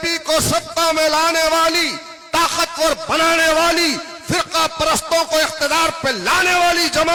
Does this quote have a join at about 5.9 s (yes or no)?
no